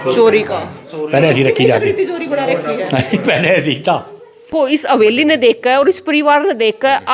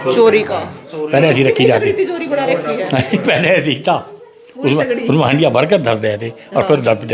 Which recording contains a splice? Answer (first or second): first